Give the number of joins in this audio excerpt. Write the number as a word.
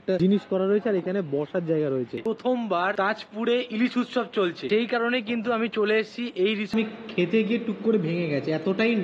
two